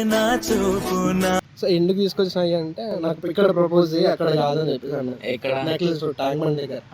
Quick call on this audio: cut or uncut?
cut